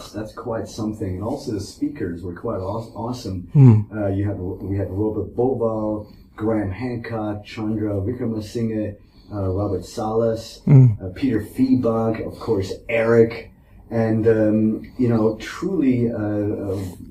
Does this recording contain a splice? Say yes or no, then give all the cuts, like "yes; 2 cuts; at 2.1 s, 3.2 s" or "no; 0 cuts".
no; 0 cuts